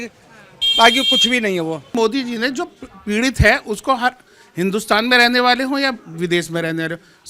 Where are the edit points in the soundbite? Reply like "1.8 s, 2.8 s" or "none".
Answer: 1.9 s